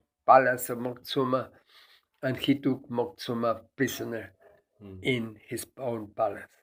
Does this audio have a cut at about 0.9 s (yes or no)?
no